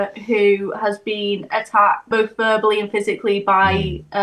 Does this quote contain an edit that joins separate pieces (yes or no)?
yes